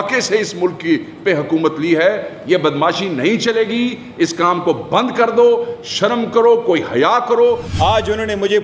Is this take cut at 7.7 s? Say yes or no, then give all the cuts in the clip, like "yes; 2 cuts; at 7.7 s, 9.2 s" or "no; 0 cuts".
yes; 1 cut; at 7.7 s